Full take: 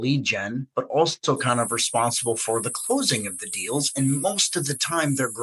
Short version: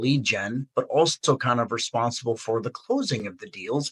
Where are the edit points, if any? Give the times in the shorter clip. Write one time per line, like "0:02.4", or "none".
none

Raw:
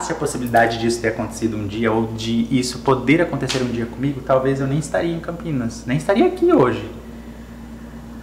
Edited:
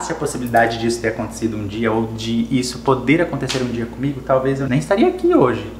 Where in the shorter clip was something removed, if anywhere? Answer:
0:04.7

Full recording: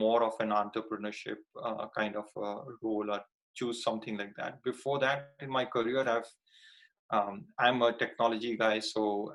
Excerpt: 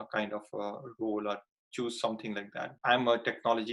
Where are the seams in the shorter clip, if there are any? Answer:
0:02.7

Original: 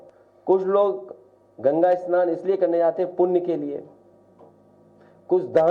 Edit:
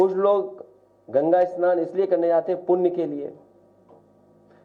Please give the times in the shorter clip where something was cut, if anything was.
none

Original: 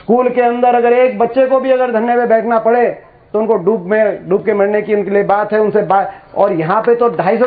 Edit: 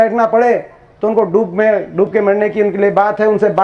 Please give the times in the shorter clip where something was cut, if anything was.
none

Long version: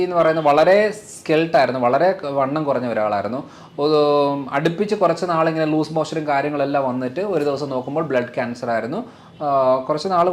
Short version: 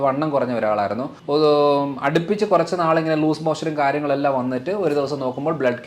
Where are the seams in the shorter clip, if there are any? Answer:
0:01.1

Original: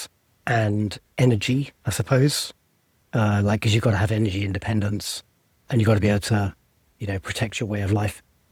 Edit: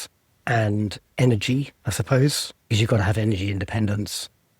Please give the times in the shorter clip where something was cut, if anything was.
0:02.7

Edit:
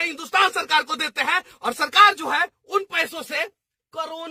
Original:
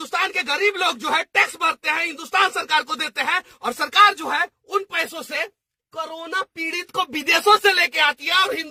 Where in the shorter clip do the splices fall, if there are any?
none

